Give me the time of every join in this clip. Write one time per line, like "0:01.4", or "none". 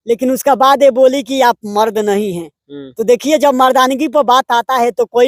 none

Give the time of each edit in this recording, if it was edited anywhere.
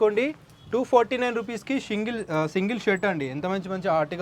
none

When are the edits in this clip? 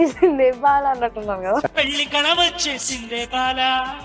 none

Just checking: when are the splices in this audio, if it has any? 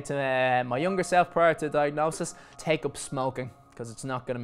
0:02.4

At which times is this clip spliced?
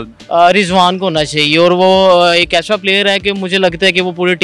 none

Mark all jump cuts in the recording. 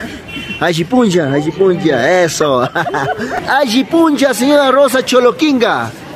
0:03.3

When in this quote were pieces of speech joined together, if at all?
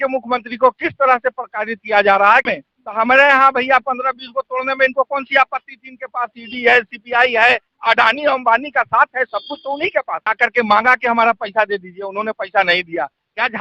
0:02.5
0:10.2

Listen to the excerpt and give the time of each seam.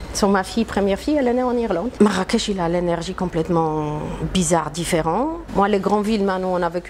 0:01.9
0:05.4

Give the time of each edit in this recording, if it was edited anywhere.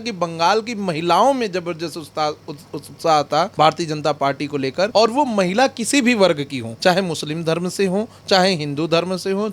0:03.5
0:04.9
0:06.6

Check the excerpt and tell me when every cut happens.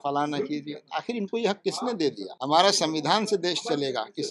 0:02.3

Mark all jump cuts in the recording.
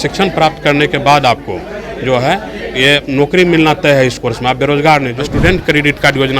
0:05.2

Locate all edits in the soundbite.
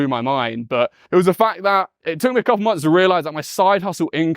0:01.0
0:02.0

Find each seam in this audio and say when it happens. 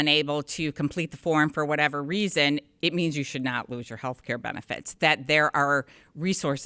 none

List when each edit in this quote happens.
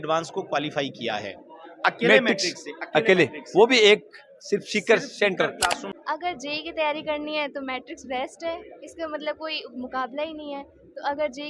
0:05.9

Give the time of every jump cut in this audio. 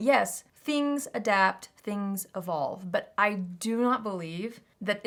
none

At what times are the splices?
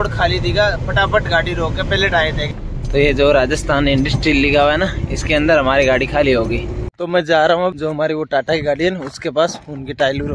0:02.5
0:06.9
0:07.8

